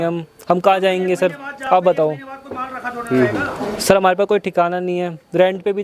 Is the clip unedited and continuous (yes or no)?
yes